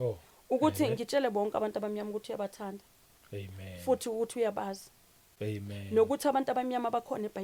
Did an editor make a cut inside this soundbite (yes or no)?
no